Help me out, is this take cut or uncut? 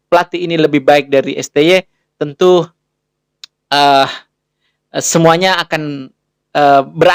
uncut